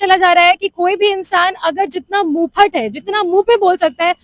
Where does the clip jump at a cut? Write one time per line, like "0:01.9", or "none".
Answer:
none

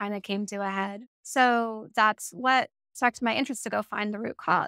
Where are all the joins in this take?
0:01.1
0:02.8

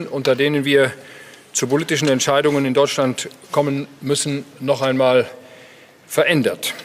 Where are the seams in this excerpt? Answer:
none

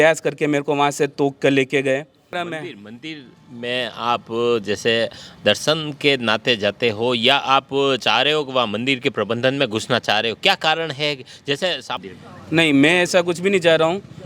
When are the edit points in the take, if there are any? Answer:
0:02.4
0:12.0

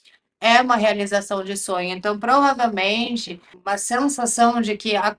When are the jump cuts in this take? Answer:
0:03.5

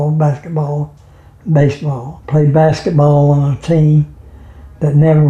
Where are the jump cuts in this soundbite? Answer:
0:02.1

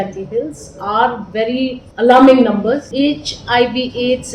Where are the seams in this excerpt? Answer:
0:01.8
0:02.9

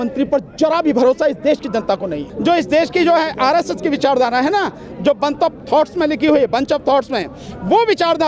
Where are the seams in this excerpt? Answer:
0:02.3

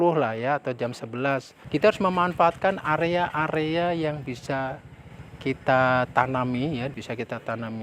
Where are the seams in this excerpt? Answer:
0:01.5
0:06.9

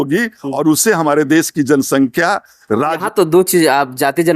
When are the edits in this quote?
0:03.0

